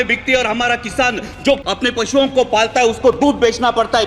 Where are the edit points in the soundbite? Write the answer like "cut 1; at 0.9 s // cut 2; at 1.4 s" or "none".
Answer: cut 1; at 1.6 s